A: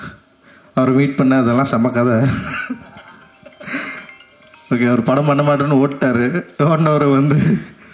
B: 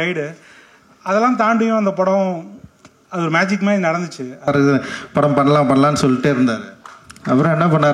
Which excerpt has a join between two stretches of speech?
B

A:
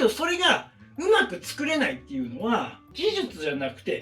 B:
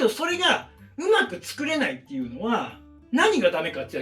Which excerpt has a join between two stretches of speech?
A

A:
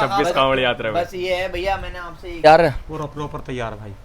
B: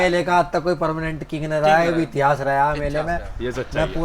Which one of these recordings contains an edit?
A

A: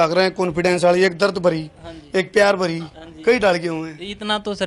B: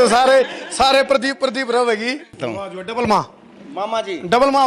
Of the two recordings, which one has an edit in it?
B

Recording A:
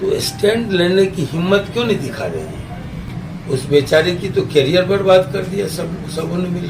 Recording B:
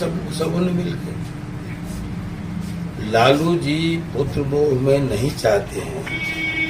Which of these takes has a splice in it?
A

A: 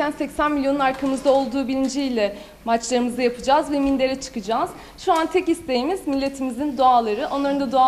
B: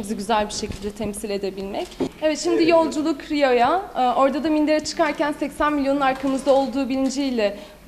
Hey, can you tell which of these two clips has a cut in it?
B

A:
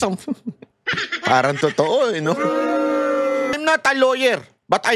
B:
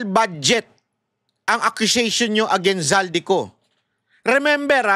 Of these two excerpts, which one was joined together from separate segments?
A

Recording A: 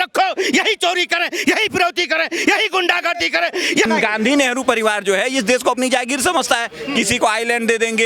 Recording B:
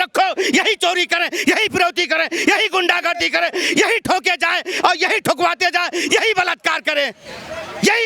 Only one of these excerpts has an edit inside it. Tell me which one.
A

